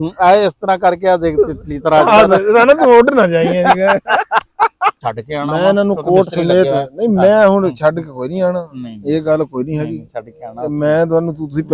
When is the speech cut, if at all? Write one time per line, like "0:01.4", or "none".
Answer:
0:05.0